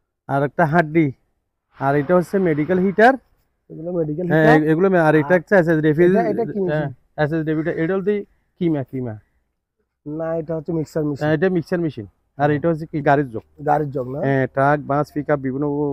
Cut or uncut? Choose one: cut